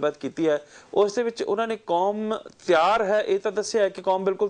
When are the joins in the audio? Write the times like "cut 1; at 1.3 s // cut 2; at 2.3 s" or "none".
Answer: cut 1; at 1.6 s